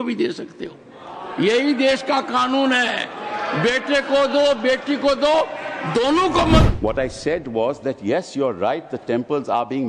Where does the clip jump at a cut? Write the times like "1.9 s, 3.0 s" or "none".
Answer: 6.7 s